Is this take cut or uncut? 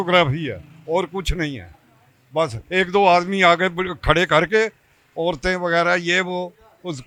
uncut